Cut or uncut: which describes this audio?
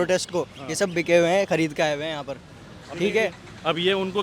uncut